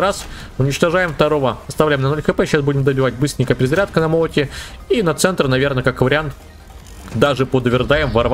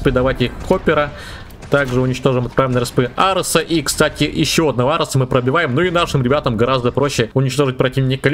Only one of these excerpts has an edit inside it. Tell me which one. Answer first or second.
second